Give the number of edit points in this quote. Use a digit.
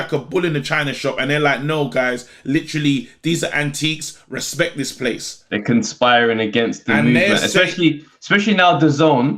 0